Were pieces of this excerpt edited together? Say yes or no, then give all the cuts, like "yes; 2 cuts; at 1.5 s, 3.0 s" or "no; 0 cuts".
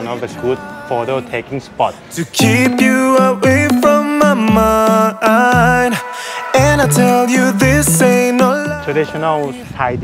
yes; 1 cut; at 2.1 s